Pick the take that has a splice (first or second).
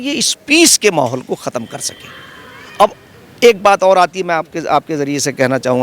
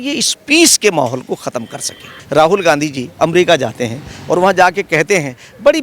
second